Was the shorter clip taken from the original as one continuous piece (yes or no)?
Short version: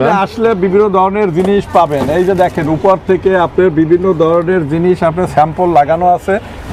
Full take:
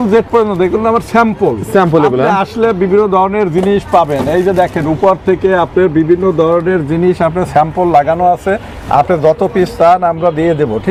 yes